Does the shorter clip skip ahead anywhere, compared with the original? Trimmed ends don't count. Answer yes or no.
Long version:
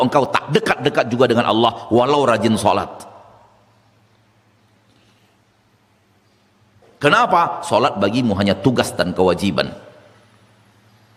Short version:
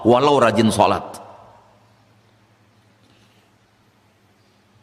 no